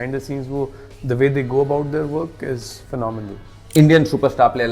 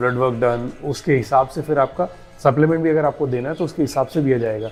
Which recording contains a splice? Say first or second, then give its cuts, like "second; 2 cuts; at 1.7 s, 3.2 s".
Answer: first; 1 cut; at 3.6 s